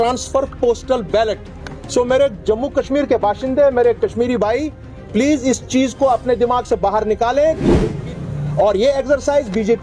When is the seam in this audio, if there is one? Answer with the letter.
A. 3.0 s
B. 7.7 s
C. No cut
B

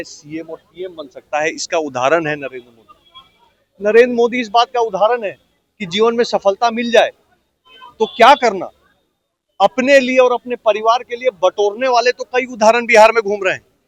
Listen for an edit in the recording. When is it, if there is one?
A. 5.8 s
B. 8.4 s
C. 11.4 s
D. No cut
D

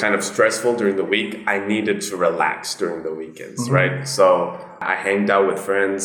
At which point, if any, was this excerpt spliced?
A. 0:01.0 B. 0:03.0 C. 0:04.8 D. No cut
C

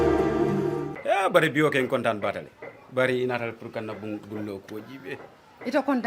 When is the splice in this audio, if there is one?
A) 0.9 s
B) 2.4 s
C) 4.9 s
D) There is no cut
A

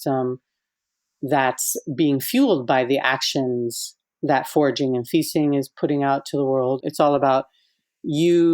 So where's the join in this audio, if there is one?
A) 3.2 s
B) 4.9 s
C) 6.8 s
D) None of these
C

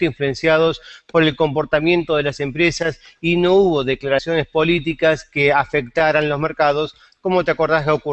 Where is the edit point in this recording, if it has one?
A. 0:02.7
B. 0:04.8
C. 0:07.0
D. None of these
A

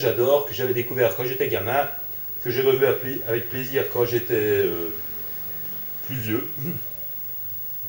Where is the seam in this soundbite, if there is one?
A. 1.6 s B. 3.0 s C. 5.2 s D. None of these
A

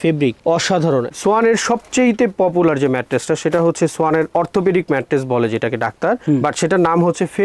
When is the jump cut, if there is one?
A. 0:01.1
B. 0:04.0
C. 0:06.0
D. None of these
A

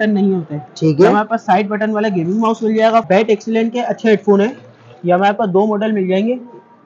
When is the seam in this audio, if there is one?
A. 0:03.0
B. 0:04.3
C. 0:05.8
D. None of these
A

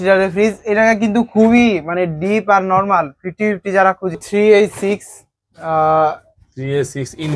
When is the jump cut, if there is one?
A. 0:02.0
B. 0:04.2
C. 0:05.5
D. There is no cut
B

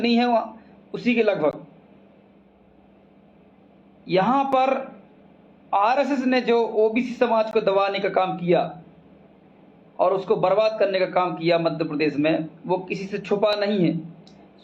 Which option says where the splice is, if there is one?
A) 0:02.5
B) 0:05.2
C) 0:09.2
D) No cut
A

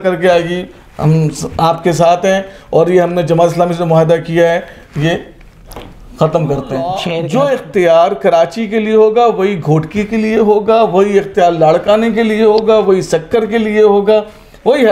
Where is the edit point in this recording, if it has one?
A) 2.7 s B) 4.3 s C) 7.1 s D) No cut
C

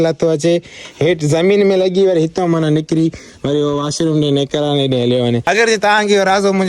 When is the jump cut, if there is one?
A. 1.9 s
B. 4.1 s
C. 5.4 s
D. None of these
C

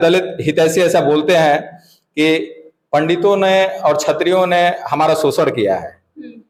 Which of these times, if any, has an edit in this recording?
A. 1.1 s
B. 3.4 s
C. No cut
C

